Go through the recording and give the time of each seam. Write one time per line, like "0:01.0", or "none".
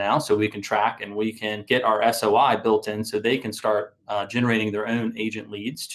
0:01.5